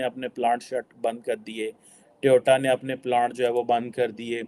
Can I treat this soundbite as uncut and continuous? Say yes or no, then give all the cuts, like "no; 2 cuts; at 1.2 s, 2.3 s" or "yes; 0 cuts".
yes; 0 cuts